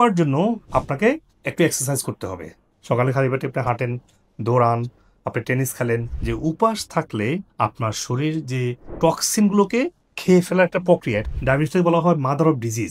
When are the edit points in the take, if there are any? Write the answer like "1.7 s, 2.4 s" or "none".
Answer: 2.7 s, 6.1 s, 11.3 s